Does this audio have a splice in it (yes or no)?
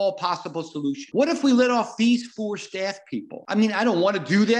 yes